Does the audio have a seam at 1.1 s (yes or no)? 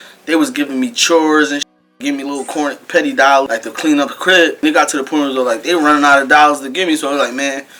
no